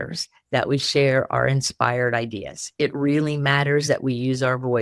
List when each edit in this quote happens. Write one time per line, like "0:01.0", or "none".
none